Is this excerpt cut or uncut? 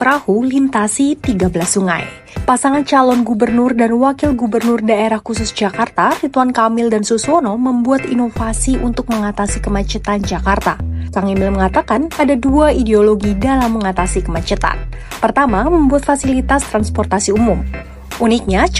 uncut